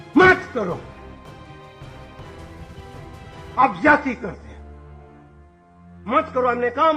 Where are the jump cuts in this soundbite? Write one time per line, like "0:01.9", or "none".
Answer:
0:01.0
0:03.5
0:04.4
0:06.1